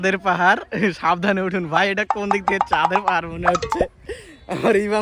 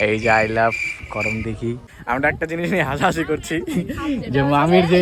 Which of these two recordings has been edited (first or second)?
second